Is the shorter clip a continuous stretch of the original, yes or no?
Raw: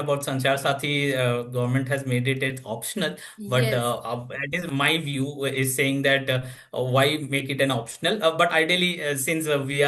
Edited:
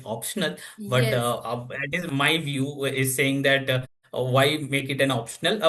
yes